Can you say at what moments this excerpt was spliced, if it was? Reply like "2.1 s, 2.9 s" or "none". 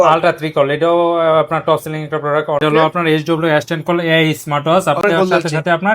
2.6 s, 5.0 s